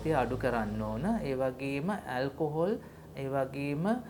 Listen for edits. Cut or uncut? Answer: uncut